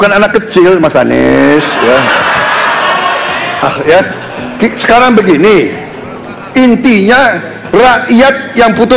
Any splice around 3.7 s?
yes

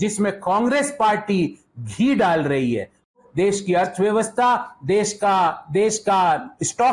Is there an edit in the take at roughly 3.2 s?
yes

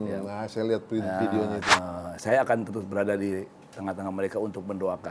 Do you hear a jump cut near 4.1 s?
no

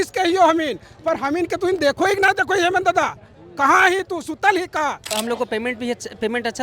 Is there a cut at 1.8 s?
no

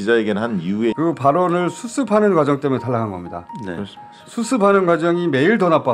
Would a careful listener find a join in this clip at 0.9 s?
yes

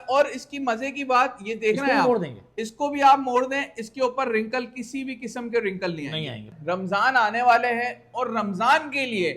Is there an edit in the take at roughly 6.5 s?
yes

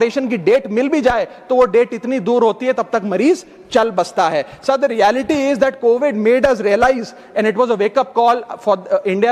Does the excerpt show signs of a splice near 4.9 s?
no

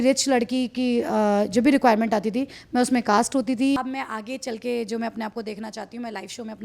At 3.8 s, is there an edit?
yes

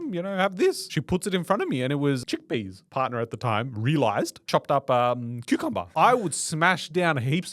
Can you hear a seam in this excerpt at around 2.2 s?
yes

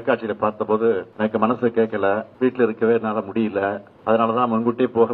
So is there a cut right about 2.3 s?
yes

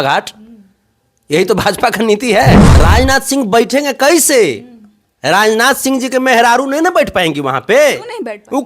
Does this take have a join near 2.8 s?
yes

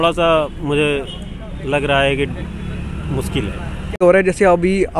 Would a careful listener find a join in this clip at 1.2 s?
no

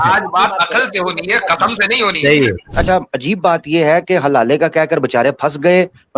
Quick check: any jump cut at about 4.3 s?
no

